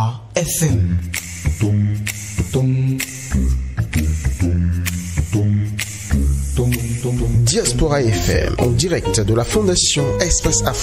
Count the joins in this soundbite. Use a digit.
0